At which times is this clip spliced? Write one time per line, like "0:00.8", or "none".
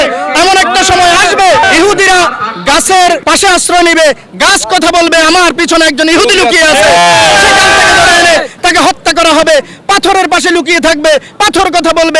0:01.6
0:03.2